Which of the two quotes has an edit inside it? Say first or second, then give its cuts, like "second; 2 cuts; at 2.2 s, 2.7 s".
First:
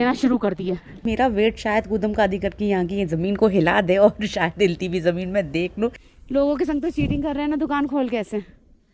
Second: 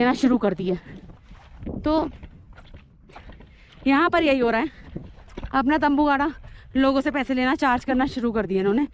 first; 2 cuts; at 1.1 s, 6.1 s